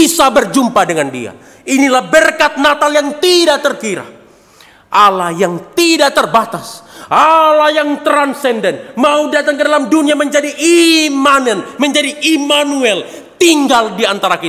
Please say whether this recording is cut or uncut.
uncut